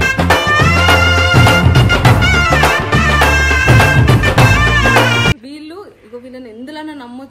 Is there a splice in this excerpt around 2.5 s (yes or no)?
no